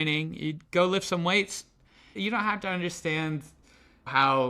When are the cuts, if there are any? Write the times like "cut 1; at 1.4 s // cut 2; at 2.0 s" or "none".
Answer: cut 1; at 2.1 s